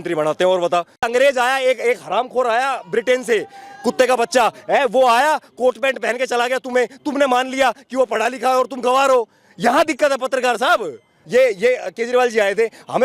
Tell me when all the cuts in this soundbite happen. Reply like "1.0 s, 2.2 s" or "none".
1.0 s, 11.2 s